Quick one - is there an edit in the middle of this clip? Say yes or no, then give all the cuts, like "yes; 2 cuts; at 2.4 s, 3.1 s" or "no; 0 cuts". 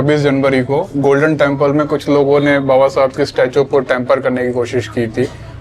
no; 0 cuts